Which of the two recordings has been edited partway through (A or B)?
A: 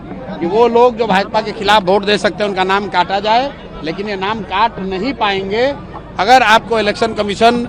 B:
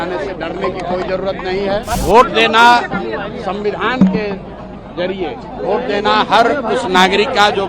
B